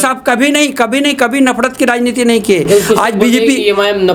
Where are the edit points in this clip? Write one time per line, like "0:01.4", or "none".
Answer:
none